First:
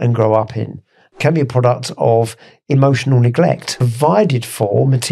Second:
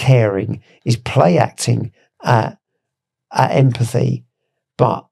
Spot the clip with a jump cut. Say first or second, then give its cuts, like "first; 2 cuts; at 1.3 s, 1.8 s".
first; 2 cuts; at 1.1 s, 3.8 s